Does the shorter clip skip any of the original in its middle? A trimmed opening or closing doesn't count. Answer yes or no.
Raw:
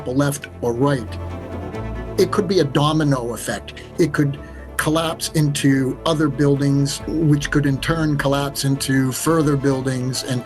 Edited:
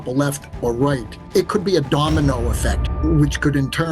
yes